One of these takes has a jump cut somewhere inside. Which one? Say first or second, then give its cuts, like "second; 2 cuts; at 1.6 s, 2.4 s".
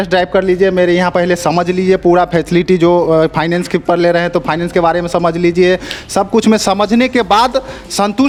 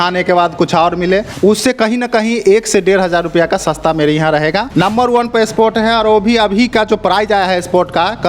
second; 2 cuts; at 1.3 s, 4.7 s